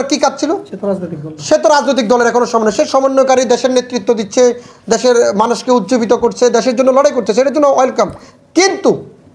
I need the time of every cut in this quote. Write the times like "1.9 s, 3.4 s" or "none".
none